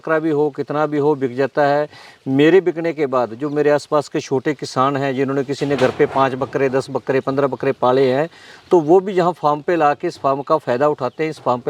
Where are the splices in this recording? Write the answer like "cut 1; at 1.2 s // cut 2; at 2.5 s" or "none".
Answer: none

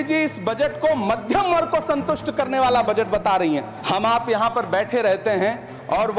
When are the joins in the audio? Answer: cut 1; at 3.7 s

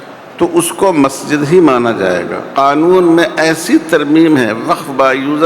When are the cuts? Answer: cut 1; at 2.4 s

